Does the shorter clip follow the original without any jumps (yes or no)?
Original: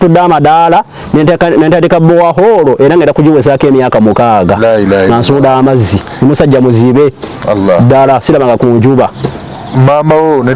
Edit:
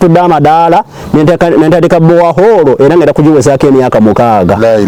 yes